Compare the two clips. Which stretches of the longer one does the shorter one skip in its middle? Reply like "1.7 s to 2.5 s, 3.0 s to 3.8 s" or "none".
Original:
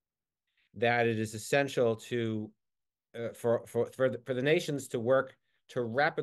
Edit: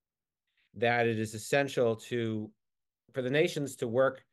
3.1 s to 4.2 s